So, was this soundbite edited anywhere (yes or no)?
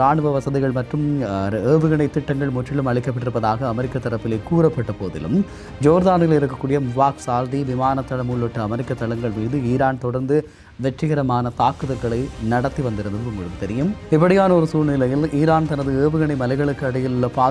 no